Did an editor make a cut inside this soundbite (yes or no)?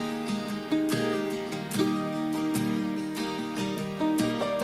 no